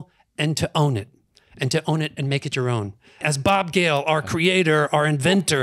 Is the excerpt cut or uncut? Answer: cut